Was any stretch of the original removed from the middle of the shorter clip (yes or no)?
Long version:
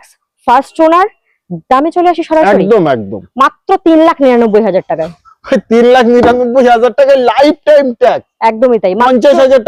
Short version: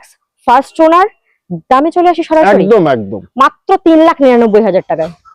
no